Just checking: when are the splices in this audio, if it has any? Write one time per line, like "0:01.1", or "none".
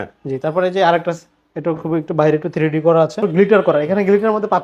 0:03.2